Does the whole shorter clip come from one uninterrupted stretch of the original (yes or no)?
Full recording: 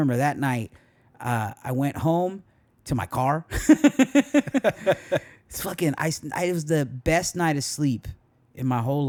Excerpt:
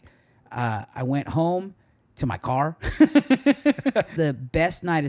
no